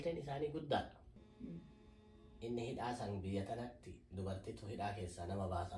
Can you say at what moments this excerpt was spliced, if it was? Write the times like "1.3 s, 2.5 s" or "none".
1.2 s